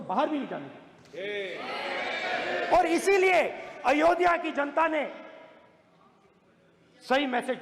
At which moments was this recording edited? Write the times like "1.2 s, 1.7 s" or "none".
none

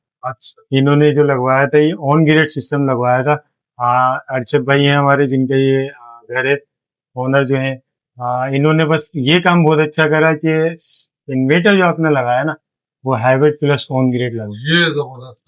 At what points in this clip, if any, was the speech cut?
none

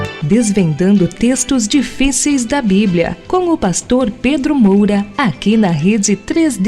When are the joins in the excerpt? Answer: 5.1 s

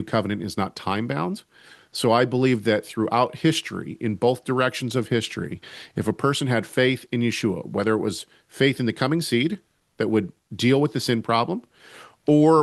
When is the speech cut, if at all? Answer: none

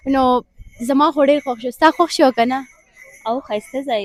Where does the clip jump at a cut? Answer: none

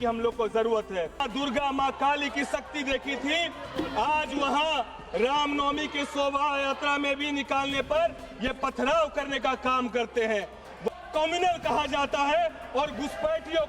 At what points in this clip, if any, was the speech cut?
1.2 s, 10.9 s

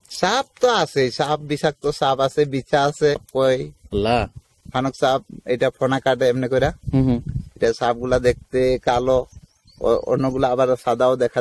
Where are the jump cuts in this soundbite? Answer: 3.3 s

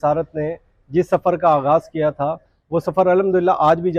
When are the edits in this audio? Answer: none

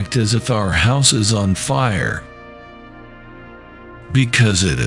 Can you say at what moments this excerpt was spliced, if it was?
2.4 s, 4.1 s

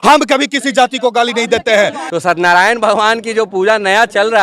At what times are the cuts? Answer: 2.0 s

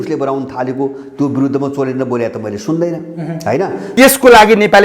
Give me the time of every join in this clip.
3.9 s

